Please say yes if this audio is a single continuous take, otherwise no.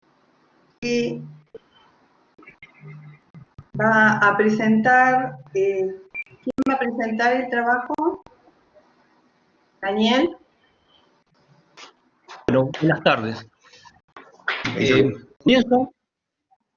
no